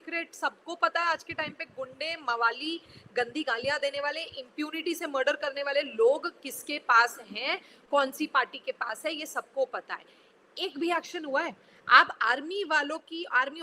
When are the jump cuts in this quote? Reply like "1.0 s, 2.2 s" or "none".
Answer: none